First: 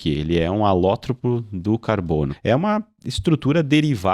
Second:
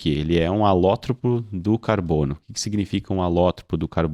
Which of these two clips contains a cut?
first; 1 cut; at 2.3 s

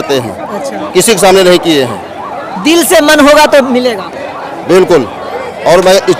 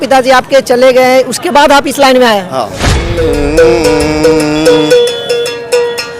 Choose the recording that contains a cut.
second; 1 cut; at 3.1 s

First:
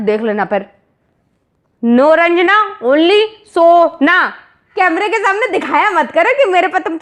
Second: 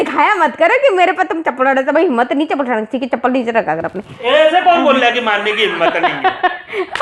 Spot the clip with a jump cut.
first; 1 cut; at 4.6 s

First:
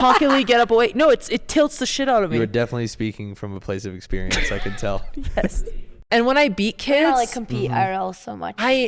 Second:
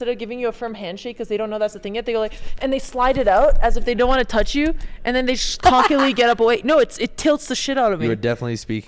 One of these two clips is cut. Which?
first; 1 cut; at 6.0 s

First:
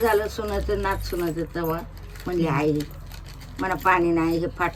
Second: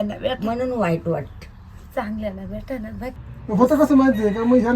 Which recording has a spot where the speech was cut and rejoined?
second; 1 cut; at 3.2 s

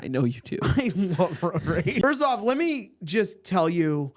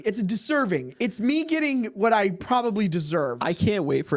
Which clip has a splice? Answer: first; 1 cut; at 2.0 s

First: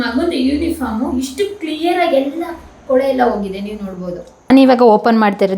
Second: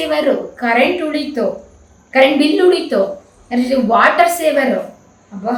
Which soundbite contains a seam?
first; 1 cut; at 4.5 s

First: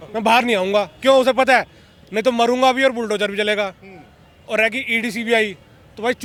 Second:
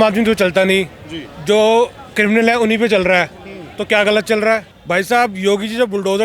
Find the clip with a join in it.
second; 1 cut; at 4.7 s

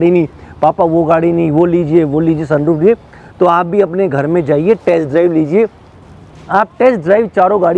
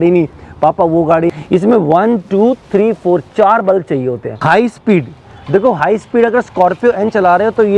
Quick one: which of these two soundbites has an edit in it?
second; 2 cuts; at 1.3 s, 4.3 s

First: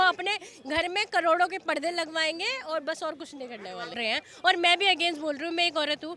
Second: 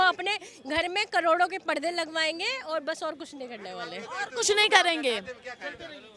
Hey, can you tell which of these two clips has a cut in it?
first; 1 cut; at 4.0 s

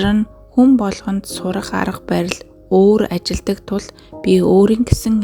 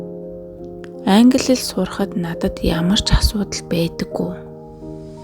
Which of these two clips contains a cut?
second; 1 cut; at 4.3 s

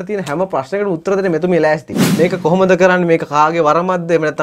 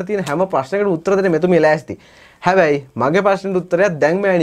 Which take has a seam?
first; 1 cut; at 2.0 s

